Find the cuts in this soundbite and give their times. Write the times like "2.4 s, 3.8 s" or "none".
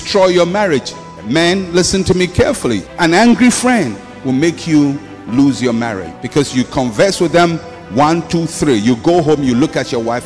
none